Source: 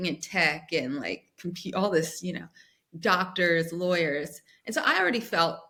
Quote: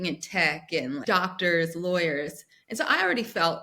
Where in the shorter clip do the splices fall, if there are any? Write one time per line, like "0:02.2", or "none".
0:01.0